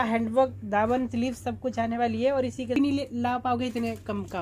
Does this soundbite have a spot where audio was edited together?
yes; 1 cut; at 2.8 s

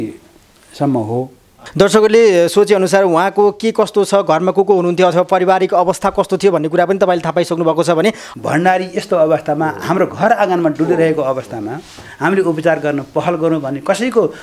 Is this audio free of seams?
no; 2 cuts; at 1.6 s, 8.2 s

